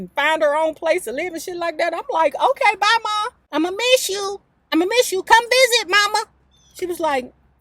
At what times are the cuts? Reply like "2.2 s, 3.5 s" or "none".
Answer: 3.4 s, 6.4 s